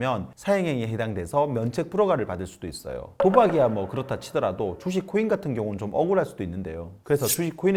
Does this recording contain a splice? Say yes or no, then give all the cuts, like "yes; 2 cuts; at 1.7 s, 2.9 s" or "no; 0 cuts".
no; 0 cuts